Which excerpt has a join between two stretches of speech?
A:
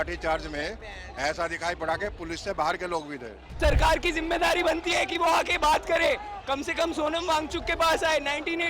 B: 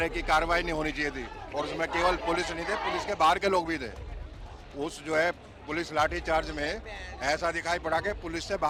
A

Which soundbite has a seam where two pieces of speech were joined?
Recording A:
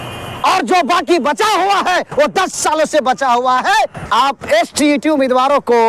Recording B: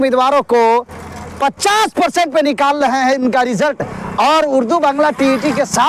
A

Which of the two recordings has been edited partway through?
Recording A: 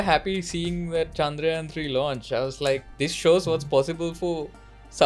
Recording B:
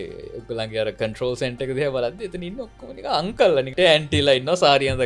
B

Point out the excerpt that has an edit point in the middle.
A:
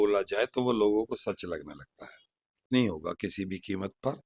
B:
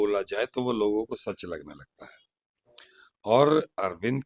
A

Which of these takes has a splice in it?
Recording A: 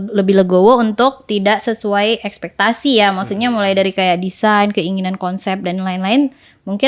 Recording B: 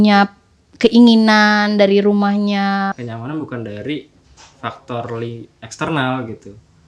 B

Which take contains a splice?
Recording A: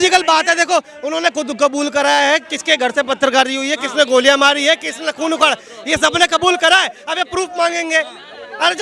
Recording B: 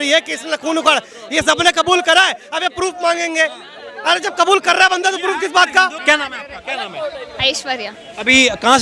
B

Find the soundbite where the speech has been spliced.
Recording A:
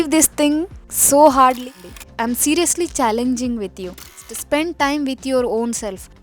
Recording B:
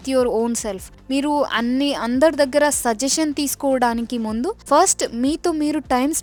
A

